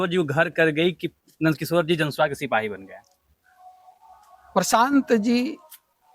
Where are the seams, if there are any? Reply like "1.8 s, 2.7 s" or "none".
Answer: none